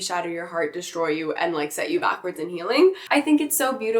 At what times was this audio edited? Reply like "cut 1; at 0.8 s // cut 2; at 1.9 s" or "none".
cut 1; at 3.0 s